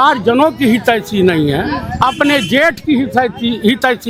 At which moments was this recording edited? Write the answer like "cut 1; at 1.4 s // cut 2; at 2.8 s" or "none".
none